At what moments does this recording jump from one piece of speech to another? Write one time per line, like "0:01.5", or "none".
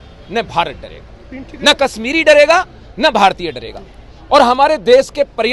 none